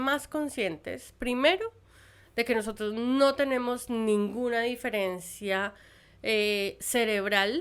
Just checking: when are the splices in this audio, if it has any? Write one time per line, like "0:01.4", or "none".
none